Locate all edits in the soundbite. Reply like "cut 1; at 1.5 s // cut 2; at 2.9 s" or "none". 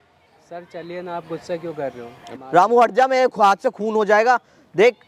cut 1; at 2.3 s